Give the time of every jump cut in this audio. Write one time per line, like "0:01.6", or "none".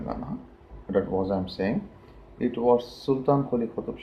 0:01.8